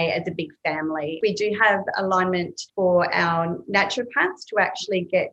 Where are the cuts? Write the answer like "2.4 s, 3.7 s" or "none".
1.1 s, 2.6 s

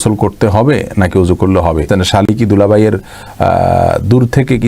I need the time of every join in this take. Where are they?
1.9 s

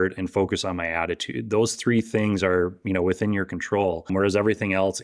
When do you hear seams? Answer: 4.1 s

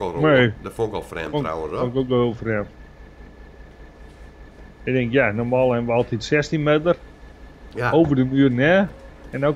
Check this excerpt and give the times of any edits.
none

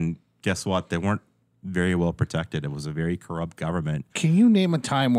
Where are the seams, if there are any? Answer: 4.1 s

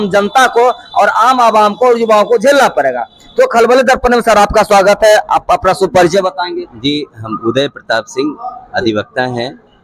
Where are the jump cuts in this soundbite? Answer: none

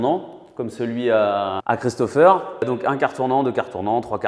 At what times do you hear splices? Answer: 2.7 s

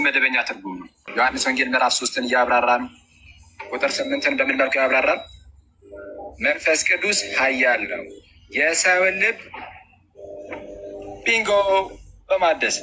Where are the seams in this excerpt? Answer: 0.9 s

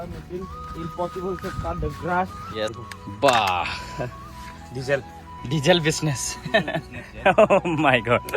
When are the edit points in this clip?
2.9 s

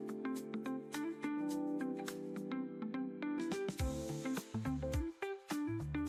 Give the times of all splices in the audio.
none

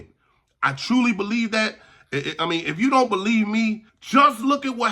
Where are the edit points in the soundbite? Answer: 3.9 s

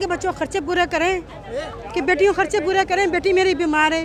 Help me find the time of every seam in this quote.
none

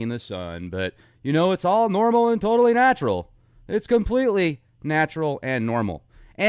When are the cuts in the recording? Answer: 2.4 s

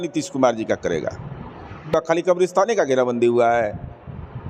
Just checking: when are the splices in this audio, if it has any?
1.9 s

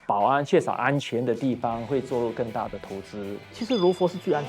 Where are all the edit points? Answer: 3.6 s

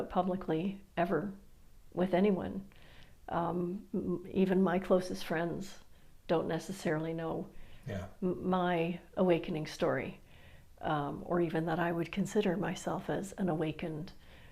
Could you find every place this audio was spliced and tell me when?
none

